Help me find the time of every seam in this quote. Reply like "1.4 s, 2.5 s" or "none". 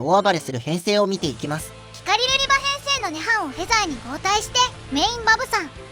none